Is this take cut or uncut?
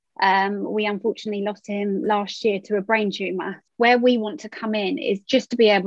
cut